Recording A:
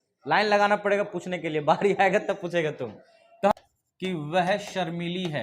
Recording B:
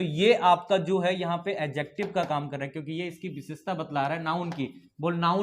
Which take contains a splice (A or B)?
A